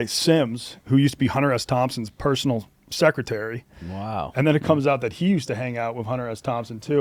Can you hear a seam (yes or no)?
no